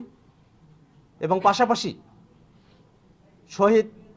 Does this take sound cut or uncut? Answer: uncut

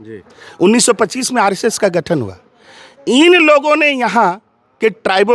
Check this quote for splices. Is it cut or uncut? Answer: uncut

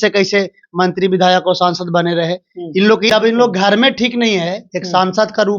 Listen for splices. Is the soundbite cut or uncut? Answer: cut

